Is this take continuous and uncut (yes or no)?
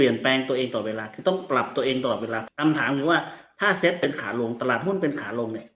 no